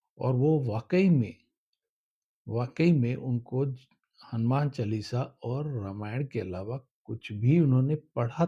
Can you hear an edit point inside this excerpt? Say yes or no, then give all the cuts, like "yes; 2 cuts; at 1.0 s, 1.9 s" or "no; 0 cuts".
no; 0 cuts